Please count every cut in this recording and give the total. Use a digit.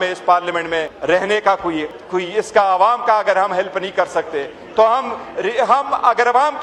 2